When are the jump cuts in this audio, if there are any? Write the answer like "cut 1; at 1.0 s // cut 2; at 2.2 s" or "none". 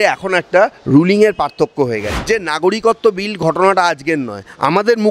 cut 1; at 2.1 s